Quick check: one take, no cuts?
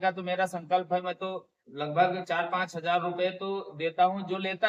yes; 0 cuts

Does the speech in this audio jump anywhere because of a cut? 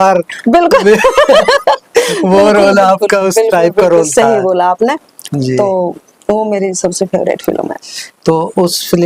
no; 0 cuts

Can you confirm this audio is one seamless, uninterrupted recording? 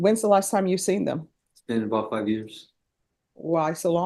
yes; 0 cuts

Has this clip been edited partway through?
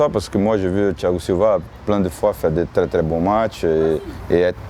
no; 0 cuts

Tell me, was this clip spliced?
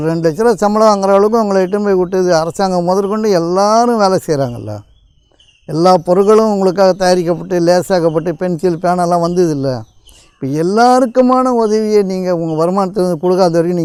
no; 0 cuts

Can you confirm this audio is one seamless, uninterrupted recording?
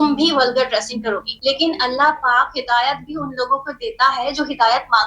no; 1 cut; at 1.3 s

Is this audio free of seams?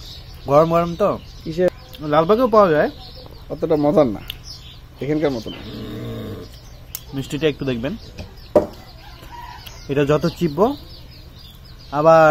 no; 1 cut; at 1.7 s

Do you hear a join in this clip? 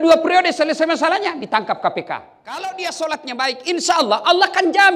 yes; 1 cut; at 2.4 s

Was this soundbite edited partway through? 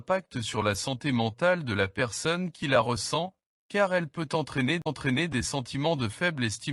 no; 0 cuts

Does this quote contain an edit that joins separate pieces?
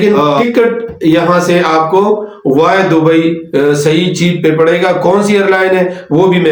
no; 0 cuts

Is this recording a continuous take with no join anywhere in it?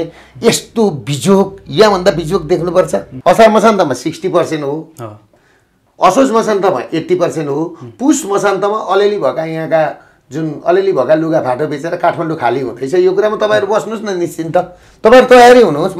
no; 1 cut; at 3.1 s

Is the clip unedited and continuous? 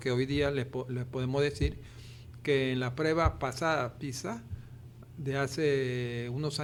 yes; 0 cuts

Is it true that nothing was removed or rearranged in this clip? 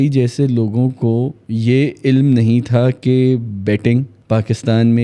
no; 2 cuts; at 1.4 s, 4.1 s

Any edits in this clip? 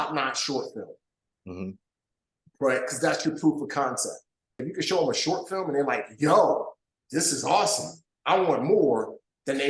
yes; 1 cut; at 4.7 s

